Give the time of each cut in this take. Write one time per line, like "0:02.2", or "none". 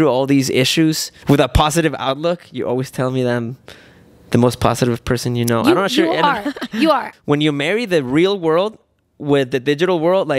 0:01.1
0:07.1

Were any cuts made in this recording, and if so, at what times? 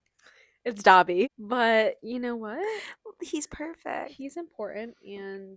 0:01.3

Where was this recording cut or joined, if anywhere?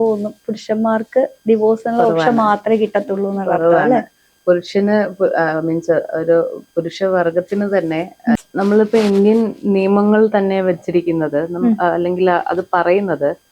none

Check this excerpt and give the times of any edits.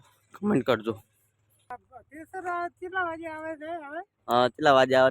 0:01.7

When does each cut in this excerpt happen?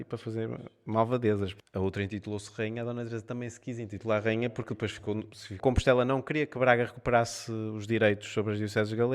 0:01.6
0:05.6

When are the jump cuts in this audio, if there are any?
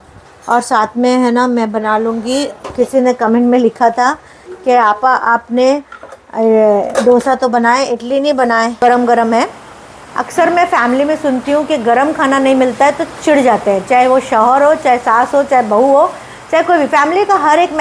0:08.8

